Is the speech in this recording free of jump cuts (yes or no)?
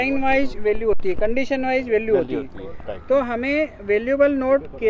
yes